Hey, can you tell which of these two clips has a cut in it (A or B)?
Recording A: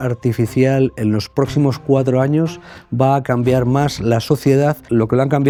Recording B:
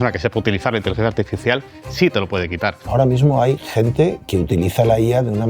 B